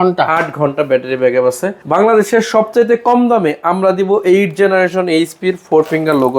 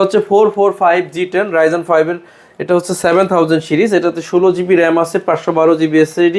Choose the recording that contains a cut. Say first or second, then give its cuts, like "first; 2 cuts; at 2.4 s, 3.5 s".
first; 1 cut; at 1.7 s